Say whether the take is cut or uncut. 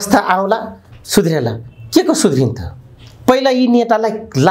uncut